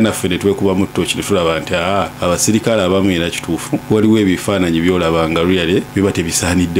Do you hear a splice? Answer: yes; 3 cuts; at 2.1 s, 3.8 s, 5.9 s

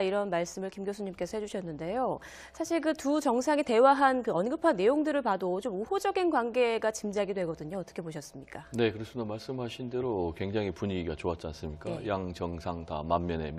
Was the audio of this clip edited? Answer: no; 0 cuts

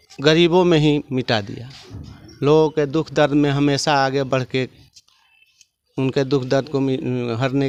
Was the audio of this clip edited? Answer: no; 0 cuts

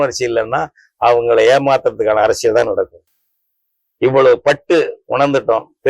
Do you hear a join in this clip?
no; 0 cuts

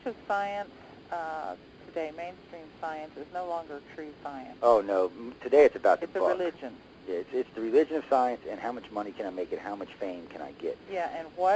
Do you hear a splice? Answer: yes; 1 cut; at 6.4 s

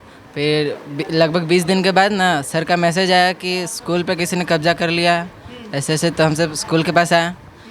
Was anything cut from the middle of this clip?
no; 0 cuts

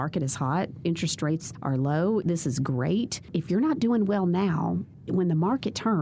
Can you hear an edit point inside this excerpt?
yes; 4 cuts; at 1.5 s, 2.2 s, 3.2 s, 4.9 s

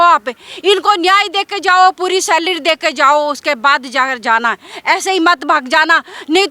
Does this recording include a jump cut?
no; 0 cuts

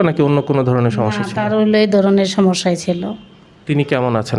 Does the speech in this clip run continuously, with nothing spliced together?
yes; 0 cuts

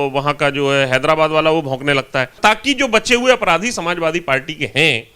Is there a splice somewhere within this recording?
yes; 1 cut; at 2.4 s

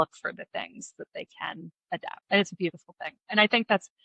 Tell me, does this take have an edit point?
yes; 1 cut; at 2.2 s

